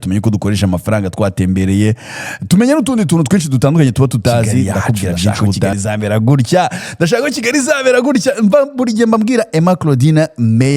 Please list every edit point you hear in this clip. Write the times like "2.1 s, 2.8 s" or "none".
5.7 s